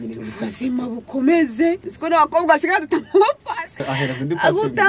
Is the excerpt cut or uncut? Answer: cut